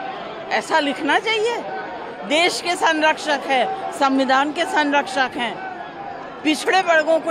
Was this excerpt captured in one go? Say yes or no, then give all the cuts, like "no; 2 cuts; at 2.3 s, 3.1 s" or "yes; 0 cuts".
yes; 0 cuts